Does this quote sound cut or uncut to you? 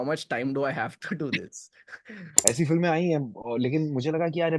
cut